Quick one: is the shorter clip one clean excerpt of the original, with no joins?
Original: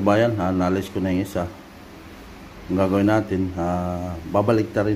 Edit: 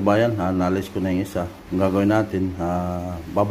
no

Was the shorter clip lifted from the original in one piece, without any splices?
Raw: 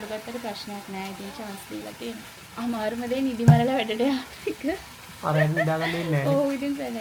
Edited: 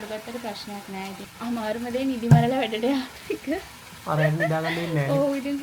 no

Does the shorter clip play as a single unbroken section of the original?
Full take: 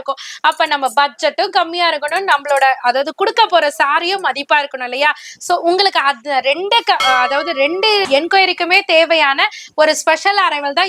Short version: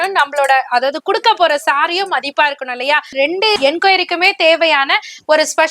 no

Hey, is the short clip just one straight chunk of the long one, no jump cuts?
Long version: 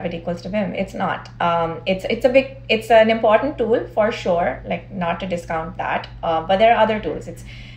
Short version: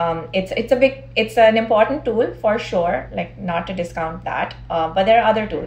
yes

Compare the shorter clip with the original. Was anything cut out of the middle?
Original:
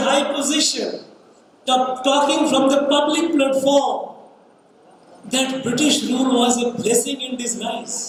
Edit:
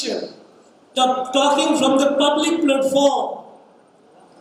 no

